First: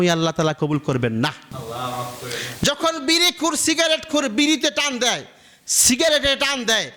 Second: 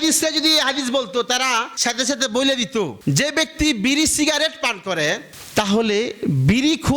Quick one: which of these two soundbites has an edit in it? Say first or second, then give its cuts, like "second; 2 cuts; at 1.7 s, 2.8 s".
second; 2 cuts; at 1.7 s, 3.0 s